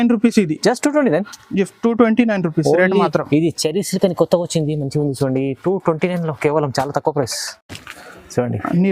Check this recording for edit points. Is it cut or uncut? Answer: cut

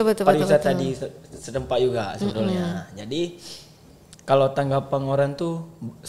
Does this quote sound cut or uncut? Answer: uncut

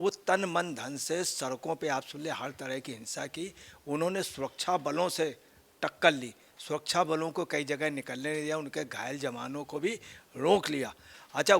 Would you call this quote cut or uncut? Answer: uncut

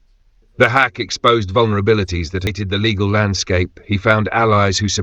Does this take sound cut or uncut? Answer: cut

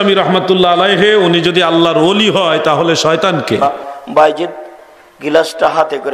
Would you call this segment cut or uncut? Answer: cut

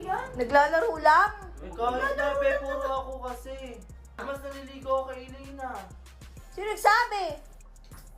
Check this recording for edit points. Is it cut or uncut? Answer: cut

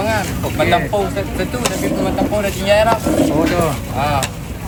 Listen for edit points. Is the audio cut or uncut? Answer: uncut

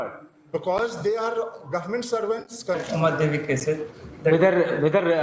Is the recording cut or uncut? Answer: cut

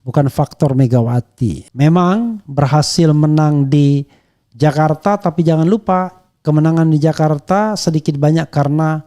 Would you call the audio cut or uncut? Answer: cut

